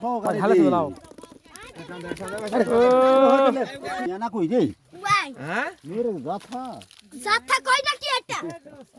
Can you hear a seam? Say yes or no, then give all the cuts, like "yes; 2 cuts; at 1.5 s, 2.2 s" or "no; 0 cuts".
no; 0 cuts